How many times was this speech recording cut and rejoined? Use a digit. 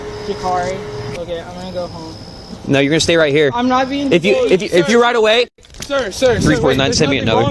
1